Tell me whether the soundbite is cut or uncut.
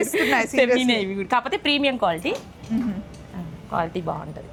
uncut